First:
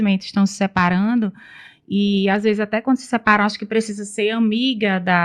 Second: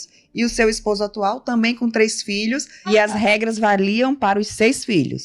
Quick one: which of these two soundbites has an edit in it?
second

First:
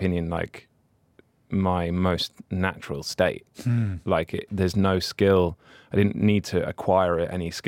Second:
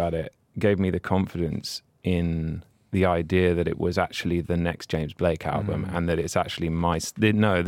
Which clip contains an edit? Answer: first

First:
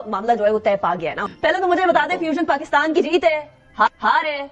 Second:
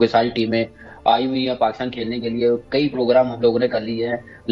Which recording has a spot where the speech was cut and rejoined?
first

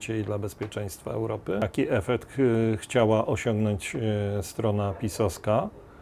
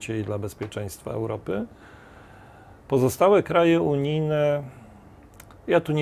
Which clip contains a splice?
first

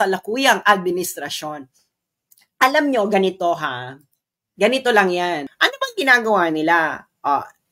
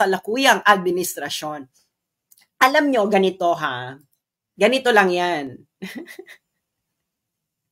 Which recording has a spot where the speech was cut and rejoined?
first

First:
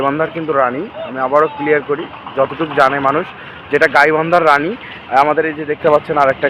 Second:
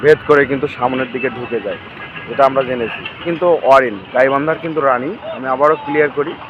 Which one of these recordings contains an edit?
second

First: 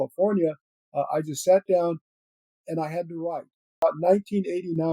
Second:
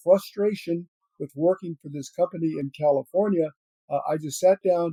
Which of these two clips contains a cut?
first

